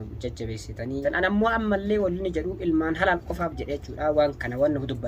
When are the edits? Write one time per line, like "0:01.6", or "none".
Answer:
0:01.0